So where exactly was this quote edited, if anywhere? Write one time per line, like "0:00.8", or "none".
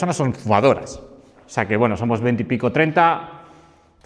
none